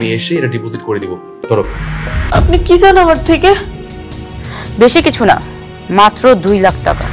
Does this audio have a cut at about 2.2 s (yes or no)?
yes